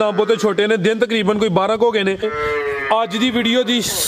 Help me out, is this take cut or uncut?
cut